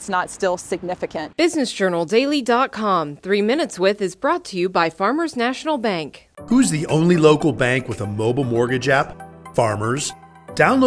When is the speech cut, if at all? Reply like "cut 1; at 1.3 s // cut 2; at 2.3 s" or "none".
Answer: cut 1; at 1.2 s

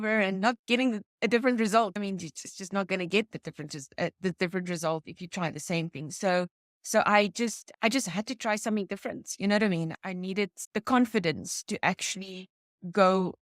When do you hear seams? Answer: none

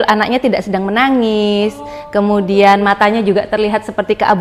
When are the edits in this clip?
none

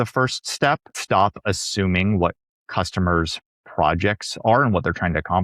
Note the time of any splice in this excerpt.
cut 1; at 0.9 s

